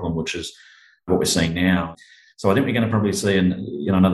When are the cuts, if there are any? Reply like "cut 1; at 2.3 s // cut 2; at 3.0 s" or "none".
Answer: cut 1; at 1.1 s // cut 2; at 2.0 s